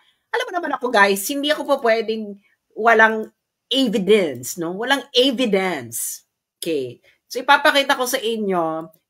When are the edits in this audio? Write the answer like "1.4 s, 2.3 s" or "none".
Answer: none